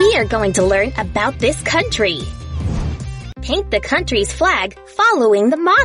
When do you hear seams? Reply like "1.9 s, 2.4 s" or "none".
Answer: 2.8 s